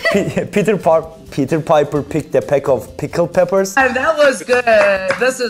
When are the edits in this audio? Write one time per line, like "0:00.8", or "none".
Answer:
0:04.0